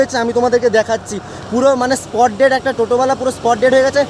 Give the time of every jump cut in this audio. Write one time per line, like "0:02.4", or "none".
none